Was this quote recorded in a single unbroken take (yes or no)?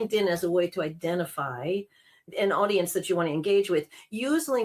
no